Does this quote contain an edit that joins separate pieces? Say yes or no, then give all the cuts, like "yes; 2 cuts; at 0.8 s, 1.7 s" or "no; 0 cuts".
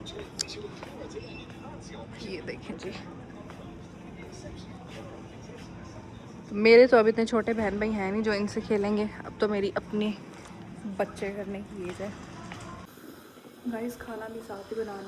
yes; 1 cut; at 12.9 s